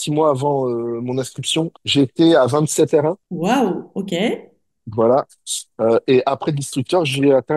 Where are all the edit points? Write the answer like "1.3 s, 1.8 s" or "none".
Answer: 1.8 s, 3.3 s